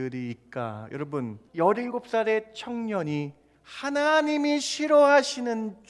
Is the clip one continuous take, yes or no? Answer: no